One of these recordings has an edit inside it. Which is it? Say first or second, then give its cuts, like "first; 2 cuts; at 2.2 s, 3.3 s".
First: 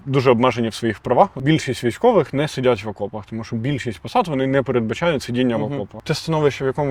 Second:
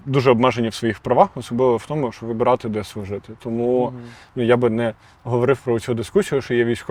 first; 2 cuts; at 1.4 s, 5.9 s